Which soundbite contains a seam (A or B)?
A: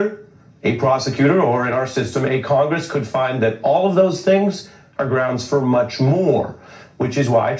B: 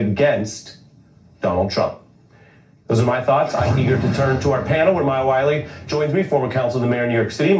A